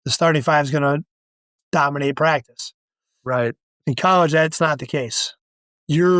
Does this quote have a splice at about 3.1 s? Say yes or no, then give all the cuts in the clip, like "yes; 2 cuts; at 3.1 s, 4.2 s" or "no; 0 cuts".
no; 0 cuts